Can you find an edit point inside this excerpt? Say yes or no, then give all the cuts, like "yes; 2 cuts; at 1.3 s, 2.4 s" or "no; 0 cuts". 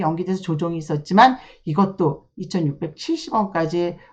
no; 0 cuts